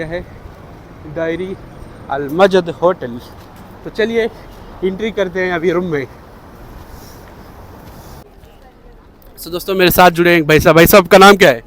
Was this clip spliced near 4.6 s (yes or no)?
no